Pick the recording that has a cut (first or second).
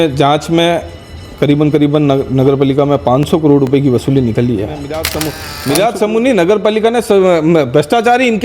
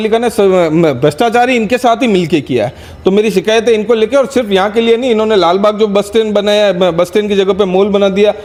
first